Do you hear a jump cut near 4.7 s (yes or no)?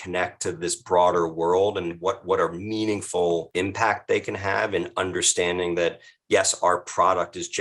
no